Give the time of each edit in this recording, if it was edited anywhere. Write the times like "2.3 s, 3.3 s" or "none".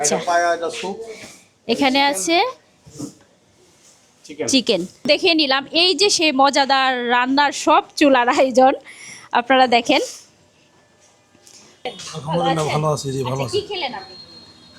5.1 s, 11.8 s